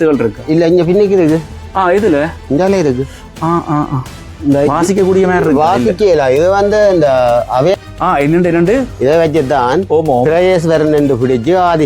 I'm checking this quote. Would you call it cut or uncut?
cut